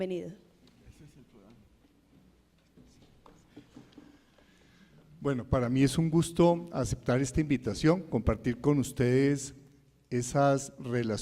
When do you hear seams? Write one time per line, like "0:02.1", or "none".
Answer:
0:05.4